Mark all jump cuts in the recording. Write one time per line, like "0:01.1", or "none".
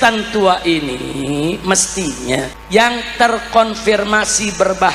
0:02.6

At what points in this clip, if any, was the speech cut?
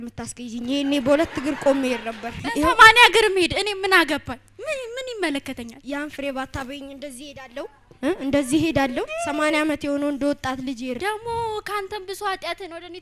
0:02.4
0:09.1
0:11.0

